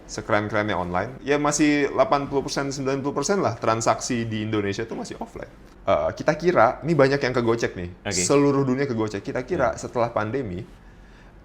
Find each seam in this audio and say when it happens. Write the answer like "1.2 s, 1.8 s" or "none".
1.1 s, 5.7 s